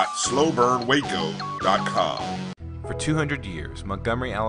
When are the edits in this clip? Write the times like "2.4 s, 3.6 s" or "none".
2.5 s